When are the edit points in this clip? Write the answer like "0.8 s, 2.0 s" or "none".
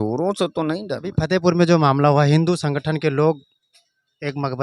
1.1 s